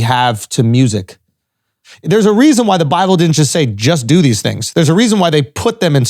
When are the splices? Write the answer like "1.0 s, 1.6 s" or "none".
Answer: 1.9 s